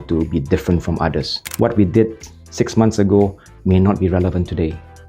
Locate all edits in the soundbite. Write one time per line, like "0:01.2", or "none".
0:01.4